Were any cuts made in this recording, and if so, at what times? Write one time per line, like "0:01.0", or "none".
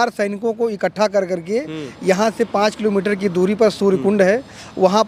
none